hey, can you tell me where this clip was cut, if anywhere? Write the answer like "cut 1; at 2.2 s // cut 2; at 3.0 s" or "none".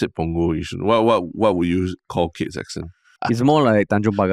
cut 1; at 3.2 s

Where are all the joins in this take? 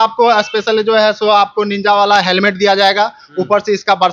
none

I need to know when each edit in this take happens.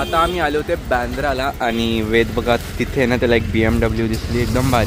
none

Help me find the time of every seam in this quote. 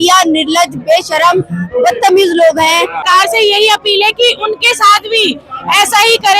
cut 1; at 3.0 s

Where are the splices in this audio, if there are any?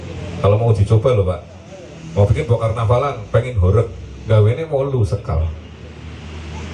none

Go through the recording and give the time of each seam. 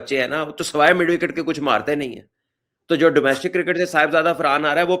none

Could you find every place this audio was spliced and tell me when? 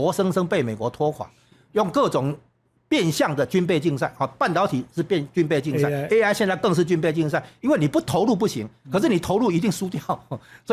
none

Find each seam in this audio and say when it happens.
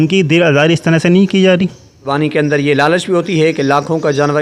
cut 1; at 2.1 s

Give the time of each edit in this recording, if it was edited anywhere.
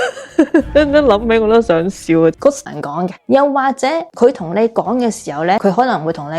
cut 1; at 2.6 s

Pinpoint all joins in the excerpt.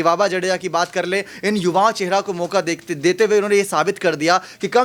none

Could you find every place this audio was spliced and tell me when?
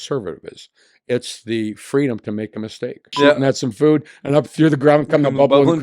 cut 1; at 3.1 s

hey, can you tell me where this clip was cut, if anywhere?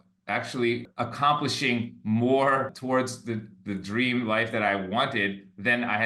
cut 1; at 0.8 s // cut 2; at 2.8 s

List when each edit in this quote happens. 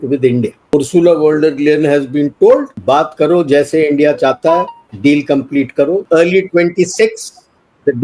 cut 1; at 0.7 s // cut 2; at 2.7 s // cut 3; at 4.8 s // cut 4; at 6.0 s

